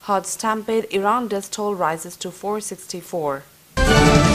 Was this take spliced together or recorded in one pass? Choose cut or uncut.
uncut